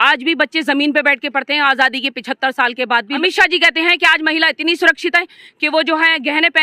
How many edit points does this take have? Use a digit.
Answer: 1